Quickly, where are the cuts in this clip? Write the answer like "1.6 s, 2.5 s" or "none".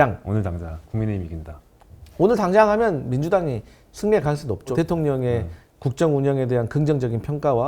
4.7 s